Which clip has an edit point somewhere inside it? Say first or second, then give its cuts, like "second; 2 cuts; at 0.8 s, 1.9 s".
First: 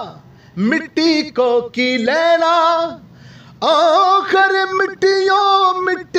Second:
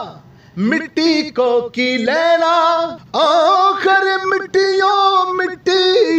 second; 1 cut; at 3.0 s